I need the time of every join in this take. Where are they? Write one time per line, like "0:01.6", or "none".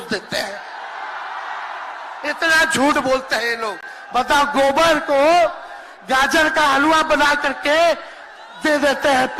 none